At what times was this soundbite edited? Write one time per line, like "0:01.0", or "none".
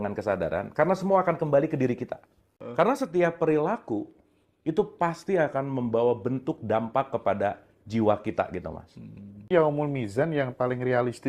0:02.6
0:09.5